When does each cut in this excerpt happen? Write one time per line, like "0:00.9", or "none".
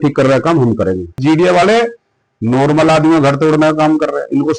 0:01.2